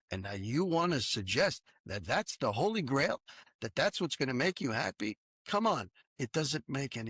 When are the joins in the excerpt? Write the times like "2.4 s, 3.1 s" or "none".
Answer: 3.4 s, 5.3 s, 6.0 s